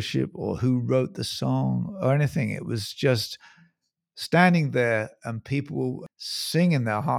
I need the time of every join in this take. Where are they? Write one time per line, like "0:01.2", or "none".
0:06.1